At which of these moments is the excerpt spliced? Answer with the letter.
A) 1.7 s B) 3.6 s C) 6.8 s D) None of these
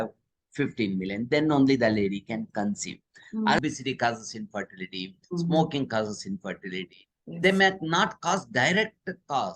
B